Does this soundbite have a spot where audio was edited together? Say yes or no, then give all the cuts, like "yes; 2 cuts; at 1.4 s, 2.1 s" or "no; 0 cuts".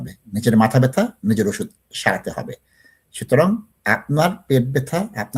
no; 0 cuts